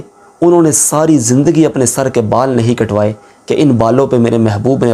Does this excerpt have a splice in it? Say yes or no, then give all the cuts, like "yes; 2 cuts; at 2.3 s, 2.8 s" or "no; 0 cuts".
no; 0 cuts